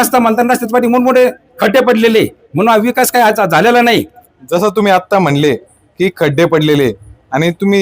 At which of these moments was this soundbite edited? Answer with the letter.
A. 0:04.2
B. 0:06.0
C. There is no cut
A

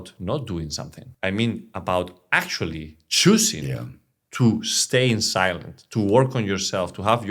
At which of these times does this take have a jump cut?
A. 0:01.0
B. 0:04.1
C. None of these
A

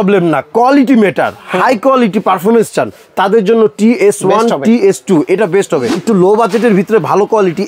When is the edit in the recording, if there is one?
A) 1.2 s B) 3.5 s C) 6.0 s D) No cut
C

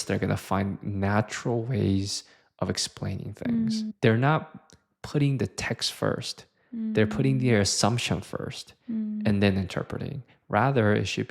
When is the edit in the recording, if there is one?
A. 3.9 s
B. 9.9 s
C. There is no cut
A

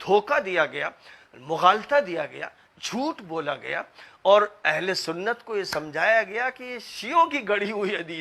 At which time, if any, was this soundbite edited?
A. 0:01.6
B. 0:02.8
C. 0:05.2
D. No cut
D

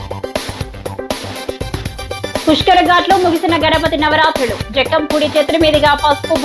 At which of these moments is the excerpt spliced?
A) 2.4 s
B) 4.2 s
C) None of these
C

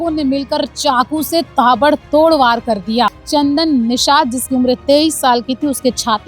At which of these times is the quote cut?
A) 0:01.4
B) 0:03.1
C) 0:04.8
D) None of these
B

